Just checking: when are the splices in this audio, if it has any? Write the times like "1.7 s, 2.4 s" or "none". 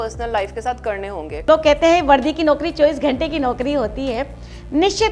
1.4 s